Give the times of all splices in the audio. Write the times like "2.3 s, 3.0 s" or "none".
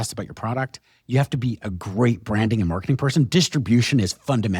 none